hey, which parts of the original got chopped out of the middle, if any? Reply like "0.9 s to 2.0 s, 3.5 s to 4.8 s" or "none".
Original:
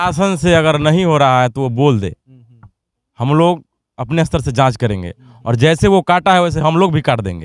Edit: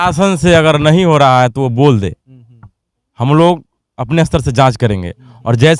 none